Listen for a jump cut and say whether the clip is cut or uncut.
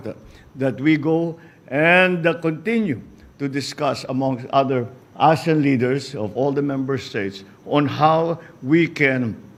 uncut